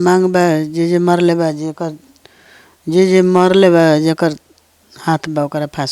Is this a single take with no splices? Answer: yes; 0 cuts

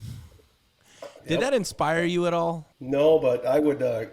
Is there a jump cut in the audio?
yes; 1 cut; at 2.7 s

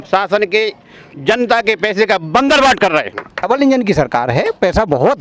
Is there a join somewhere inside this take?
yes; 1 cut; at 3.4 s

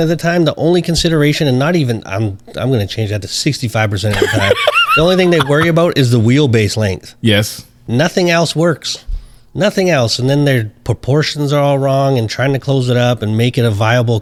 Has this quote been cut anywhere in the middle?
no; 0 cuts

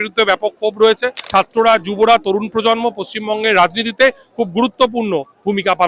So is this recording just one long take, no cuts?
no; 1 cut; at 1.2 s

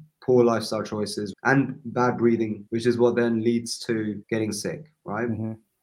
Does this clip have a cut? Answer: yes; 3 cuts; at 1.3 s, 2.6 s, 4.2 s

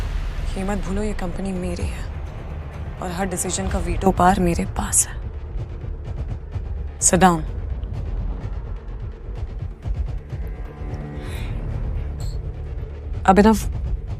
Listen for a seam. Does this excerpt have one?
no; 0 cuts

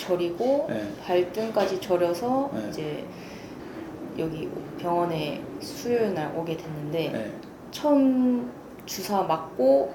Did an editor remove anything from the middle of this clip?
no; 0 cuts

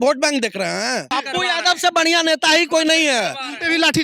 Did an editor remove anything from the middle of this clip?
yes; 1 cut; at 1.1 s

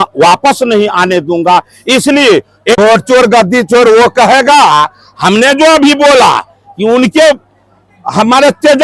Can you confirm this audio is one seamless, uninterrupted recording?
no; 1 cut; at 2.7 s

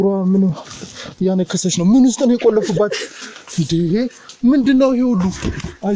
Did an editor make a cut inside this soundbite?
no; 0 cuts

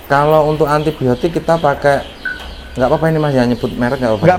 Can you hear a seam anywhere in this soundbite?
no; 0 cuts

